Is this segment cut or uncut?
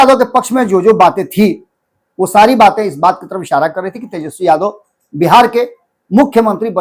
uncut